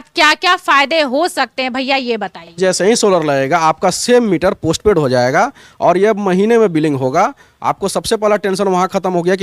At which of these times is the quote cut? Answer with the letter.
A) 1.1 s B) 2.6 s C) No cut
B